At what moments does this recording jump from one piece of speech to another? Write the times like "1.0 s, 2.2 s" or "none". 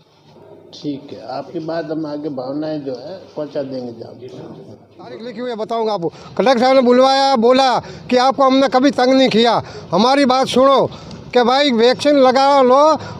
5.3 s